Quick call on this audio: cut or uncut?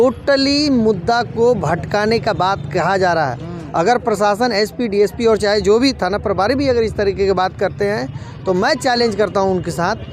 uncut